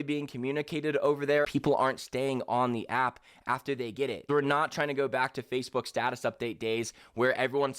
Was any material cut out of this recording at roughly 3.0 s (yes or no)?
no